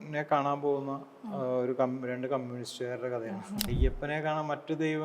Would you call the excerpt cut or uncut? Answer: cut